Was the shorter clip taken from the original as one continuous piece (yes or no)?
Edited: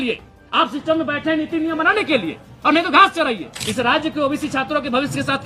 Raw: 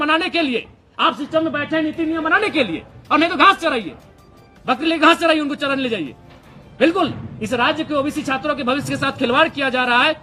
no